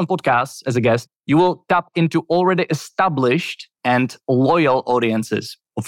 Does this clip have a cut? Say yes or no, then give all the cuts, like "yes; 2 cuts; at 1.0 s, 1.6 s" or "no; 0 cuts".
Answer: yes; 1 cut; at 1.1 s